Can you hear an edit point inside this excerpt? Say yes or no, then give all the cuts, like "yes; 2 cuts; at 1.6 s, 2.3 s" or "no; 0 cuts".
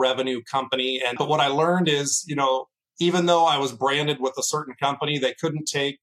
yes; 1 cut; at 1.2 s